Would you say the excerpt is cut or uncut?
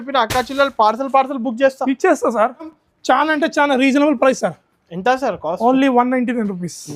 cut